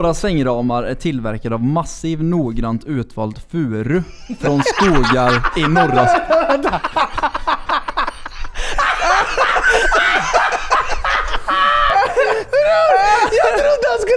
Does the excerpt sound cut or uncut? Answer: uncut